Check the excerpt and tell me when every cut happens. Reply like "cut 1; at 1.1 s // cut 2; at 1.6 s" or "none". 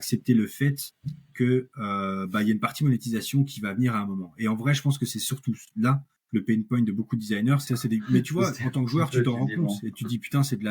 cut 1; at 7.6 s